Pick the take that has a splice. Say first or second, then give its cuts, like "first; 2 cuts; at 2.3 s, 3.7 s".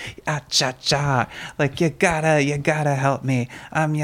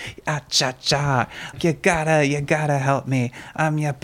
second; 1 cut; at 1.5 s